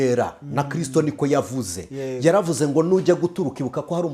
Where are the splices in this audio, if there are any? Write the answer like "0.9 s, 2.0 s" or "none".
none